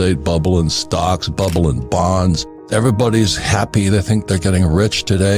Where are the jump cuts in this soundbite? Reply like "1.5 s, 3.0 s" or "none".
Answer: 2.5 s